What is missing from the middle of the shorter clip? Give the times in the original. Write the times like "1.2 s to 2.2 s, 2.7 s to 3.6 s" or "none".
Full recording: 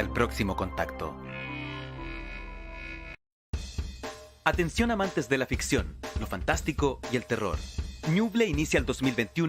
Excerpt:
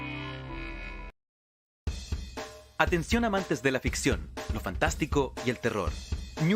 2.8 s to 3.0 s